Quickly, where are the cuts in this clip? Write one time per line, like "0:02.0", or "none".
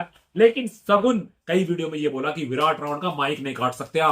0:01.3